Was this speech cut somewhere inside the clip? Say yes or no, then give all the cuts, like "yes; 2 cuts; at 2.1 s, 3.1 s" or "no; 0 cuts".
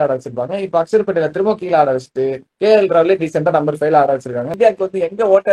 yes; 1 cut; at 4.5 s